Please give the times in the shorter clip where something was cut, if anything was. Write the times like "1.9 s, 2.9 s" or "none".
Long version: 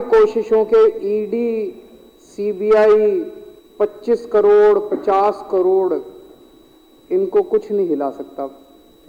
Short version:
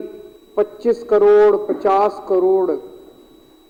none